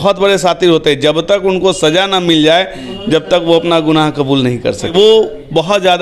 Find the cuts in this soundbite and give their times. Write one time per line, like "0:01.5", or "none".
0:04.9